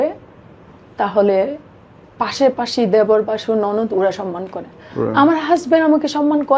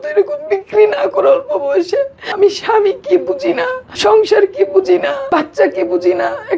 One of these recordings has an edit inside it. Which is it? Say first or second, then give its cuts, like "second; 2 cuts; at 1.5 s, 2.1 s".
second; 3 cuts; at 2.2 s, 3.8 s, 5.2 s